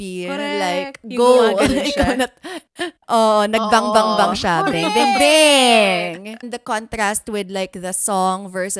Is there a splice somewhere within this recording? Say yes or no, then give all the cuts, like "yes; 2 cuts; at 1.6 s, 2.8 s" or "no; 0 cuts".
yes; 1 cut; at 6.5 s